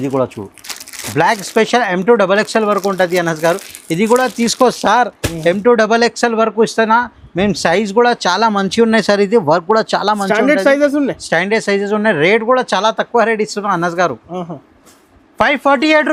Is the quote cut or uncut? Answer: uncut